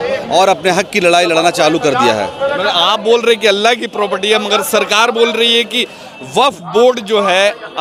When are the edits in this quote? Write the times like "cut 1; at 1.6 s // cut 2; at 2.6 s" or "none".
none